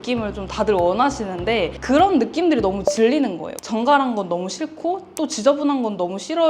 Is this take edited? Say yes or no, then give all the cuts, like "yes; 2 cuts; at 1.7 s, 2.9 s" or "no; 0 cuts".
yes; 1 cut; at 3.6 s